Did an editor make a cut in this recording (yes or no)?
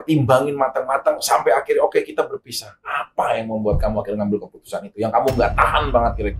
no